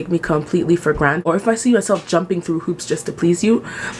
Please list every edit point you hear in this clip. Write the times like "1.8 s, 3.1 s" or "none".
1.2 s